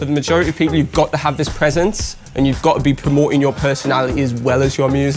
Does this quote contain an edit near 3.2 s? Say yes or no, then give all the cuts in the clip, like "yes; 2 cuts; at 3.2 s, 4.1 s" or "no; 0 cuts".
no; 0 cuts